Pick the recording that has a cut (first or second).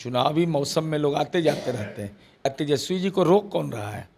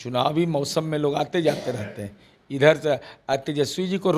first